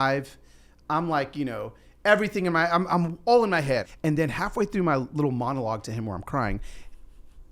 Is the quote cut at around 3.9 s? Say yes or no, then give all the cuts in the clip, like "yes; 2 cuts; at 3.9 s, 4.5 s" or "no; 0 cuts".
yes; 1 cut; at 3.9 s